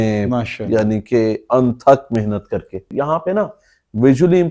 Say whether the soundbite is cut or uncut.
cut